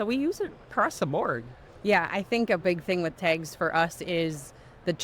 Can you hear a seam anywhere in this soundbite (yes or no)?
no